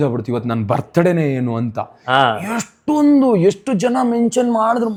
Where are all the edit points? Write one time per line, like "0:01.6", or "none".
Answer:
none